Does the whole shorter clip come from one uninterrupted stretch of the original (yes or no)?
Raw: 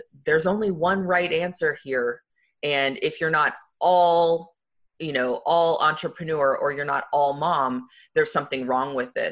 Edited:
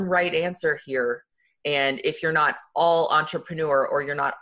no